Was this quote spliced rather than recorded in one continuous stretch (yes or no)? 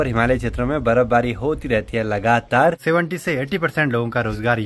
yes